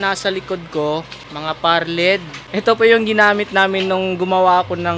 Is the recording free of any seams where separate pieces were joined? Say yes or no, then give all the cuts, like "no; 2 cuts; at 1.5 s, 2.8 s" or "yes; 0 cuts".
no; 2 cuts; at 1.2 s, 2.4 s